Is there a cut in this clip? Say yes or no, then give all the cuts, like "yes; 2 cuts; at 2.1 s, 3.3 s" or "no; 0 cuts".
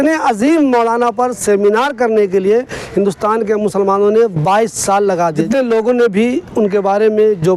yes; 1 cut; at 5.3 s